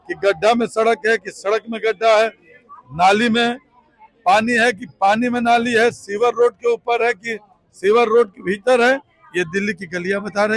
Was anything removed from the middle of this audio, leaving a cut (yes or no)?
no